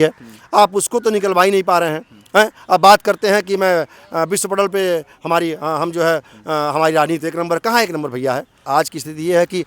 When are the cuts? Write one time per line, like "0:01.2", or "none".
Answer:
0:08.6